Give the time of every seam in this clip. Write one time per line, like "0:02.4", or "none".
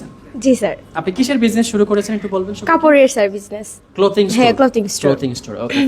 0:00.9